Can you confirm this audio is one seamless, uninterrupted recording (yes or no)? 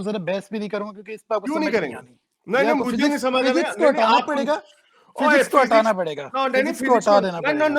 yes